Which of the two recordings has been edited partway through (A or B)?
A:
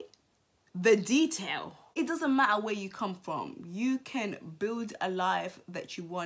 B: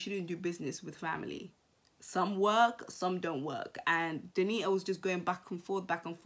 A